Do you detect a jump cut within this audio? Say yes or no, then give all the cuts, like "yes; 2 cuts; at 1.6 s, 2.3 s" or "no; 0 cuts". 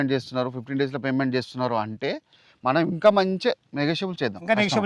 no; 0 cuts